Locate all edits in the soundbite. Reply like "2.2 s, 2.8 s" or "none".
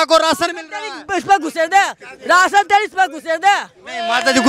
none